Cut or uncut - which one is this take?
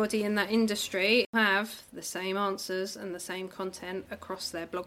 cut